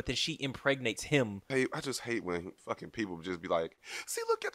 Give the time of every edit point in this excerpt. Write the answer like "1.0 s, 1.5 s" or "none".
1.5 s, 2.5 s